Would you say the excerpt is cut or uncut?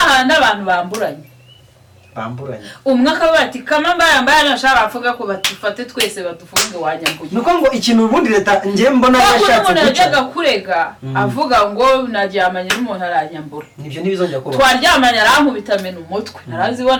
uncut